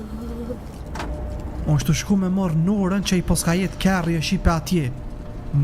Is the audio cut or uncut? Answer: uncut